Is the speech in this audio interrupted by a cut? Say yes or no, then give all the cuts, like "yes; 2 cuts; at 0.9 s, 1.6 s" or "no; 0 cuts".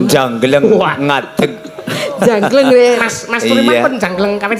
no; 0 cuts